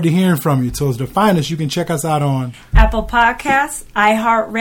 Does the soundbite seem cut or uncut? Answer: uncut